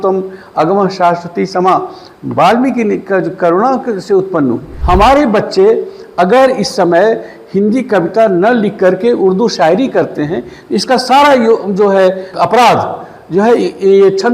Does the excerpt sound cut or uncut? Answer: cut